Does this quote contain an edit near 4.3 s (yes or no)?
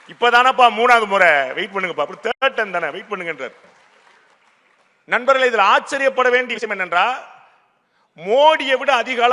yes